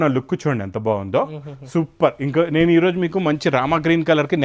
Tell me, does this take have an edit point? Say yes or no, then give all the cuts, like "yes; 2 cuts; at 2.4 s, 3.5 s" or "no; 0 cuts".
no; 0 cuts